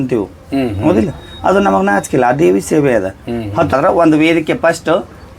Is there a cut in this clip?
yes; 1 cut; at 3.7 s

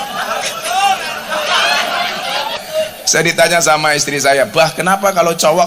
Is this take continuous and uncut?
no; 1 cut; at 2.6 s

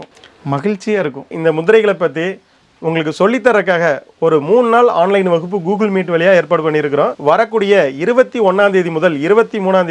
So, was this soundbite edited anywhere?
yes; 1 cut; at 1.3 s

